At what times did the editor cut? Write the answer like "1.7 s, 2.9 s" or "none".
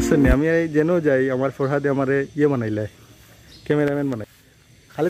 none